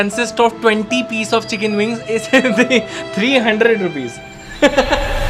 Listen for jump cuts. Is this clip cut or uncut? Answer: uncut